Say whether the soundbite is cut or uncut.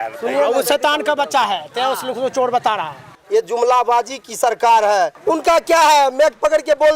cut